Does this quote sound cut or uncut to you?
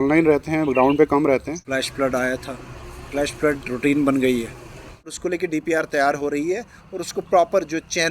cut